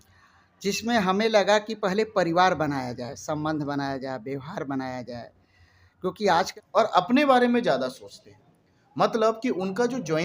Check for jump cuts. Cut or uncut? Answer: cut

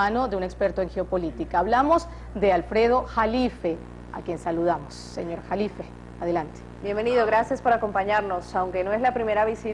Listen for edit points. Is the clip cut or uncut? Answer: uncut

